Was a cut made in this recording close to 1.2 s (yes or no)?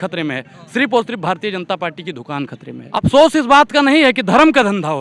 no